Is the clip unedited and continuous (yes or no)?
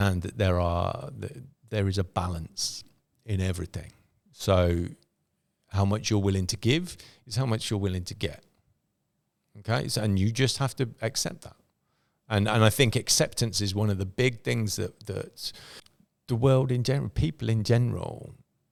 yes